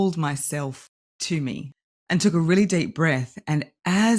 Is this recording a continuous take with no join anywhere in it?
no; 1 cut; at 1.7 s

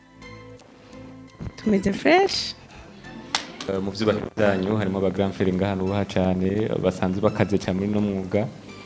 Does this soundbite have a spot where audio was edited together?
yes; 1 cut; at 3.7 s

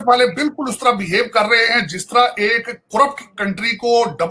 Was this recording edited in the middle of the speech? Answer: no; 0 cuts

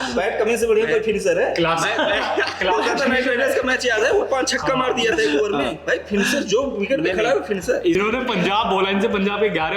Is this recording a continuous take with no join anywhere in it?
no; 1 cut; at 8.0 s

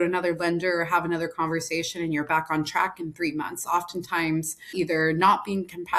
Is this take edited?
yes; 1 cut; at 4.6 s

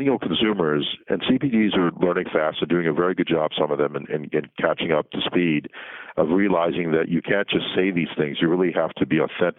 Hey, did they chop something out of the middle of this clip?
yes; 1 cut; at 1.0 s

